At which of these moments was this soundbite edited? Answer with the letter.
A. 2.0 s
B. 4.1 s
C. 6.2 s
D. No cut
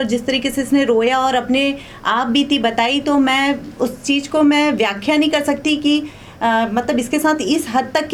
D